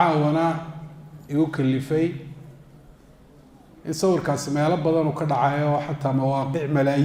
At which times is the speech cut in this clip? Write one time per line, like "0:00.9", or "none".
none